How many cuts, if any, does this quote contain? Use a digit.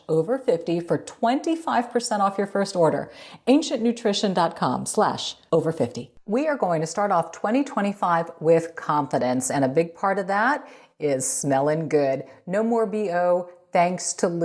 1